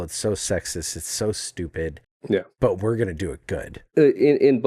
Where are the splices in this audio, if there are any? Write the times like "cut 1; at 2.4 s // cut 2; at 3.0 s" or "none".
cut 1; at 2.5 s // cut 2; at 3.8 s